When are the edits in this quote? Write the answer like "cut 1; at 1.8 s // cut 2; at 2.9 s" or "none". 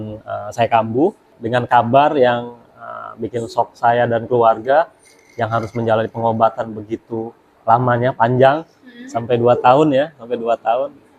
cut 1; at 1.3 s

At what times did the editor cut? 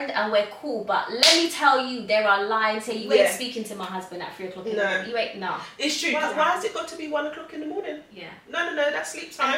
cut 1; at 6.1 s

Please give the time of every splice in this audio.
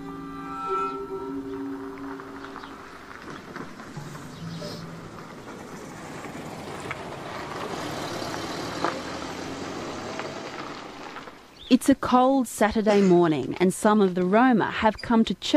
cut 1; at 11.0 s

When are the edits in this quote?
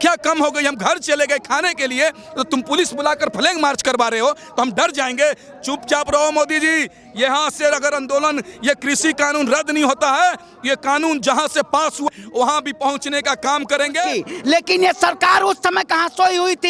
cut 1; at 12.2 s // cut 2; at 14.1 s

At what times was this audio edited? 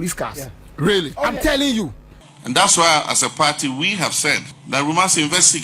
cut 1; at 2.1 s // cut 2; at 4.5 s

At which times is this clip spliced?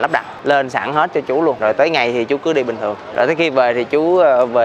cut 1; at 1.6 s // cut 2; at 3.0 s

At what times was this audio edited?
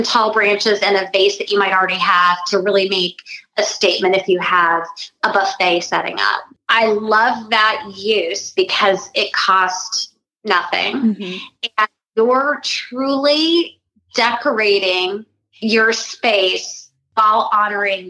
cut 1; at 17.1 s

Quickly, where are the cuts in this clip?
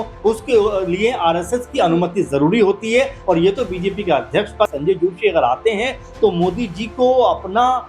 cut 1; at 4.7 s

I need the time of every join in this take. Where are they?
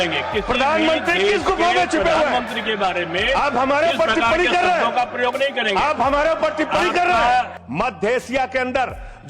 cut 1; at 7.6 s

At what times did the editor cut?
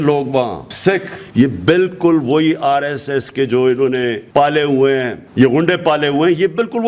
cut 1; at 1.2 s // cut 2; at 4.2 s // cut 3; at 5.2 s

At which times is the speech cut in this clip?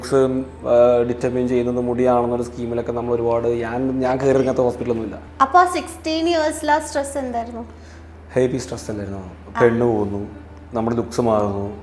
cut 1; at 5.2 s

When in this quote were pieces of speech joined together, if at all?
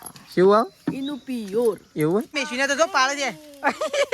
cut 1; at 2.4 s

